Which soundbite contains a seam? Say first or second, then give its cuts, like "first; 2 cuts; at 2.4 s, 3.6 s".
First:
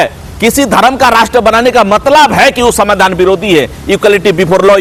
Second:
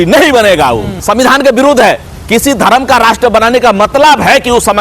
second; 1 cut; at 0.9 s